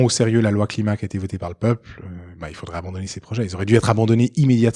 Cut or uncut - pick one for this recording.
uncut